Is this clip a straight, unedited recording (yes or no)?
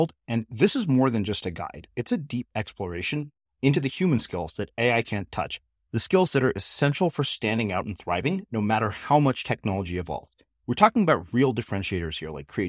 yes